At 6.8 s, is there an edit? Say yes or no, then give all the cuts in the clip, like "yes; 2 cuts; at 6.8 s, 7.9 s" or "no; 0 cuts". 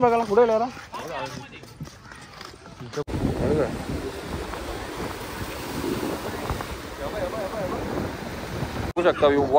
no; 2 cuts; at 3.1 s, 8.9 s